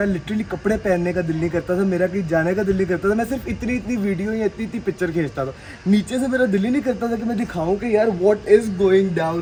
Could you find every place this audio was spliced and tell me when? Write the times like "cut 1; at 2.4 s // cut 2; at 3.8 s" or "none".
none